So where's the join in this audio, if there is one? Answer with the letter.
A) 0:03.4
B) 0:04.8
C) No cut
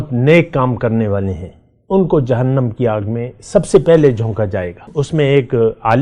B